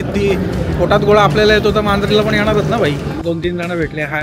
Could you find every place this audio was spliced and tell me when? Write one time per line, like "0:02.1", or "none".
0:03.2